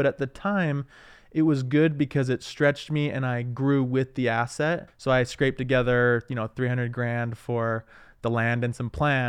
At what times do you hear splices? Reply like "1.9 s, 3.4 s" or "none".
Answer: 4.9 s